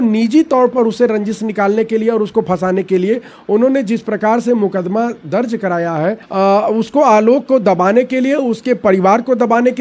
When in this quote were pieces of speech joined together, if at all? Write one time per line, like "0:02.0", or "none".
0:06.2

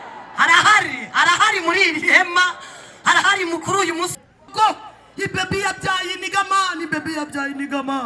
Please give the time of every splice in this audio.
0:04.2

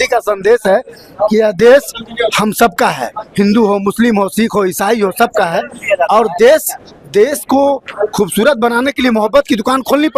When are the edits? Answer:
none

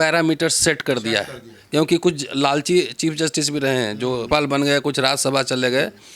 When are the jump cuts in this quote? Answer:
0:04.2

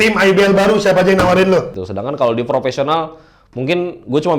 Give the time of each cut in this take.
0:01.8

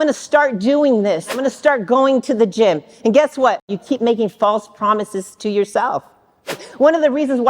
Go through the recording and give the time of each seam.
0:01.4
0:03.8
0:06.7

